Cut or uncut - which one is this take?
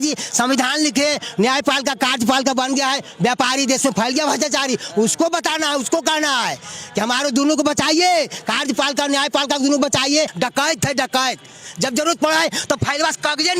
cut